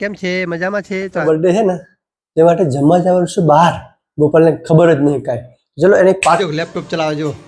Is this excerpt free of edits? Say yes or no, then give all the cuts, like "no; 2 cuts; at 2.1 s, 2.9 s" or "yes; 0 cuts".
no; 2 cuts; at 1.2 s, 6.4 s